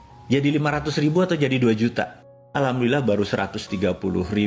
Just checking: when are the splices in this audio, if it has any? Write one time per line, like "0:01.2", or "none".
0:02.5